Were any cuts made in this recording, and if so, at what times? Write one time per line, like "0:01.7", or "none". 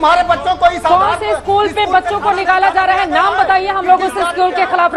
none